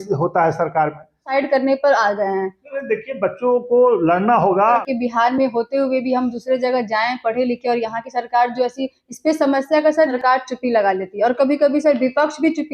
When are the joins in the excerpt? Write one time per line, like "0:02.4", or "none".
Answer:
0:01.2
0:04.9
0:10.2